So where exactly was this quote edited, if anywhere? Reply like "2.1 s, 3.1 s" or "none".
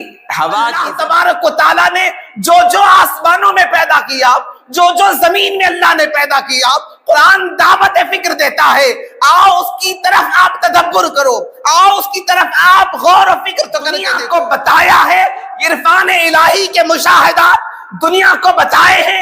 0.9 s, 14.1 s